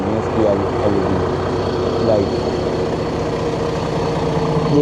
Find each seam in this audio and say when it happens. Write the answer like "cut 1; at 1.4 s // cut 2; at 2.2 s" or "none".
none